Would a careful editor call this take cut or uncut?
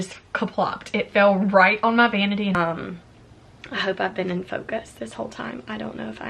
cut